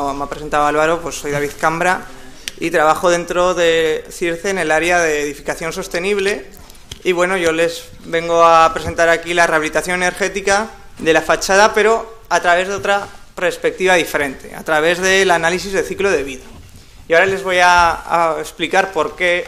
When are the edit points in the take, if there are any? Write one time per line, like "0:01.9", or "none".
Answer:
0:01.1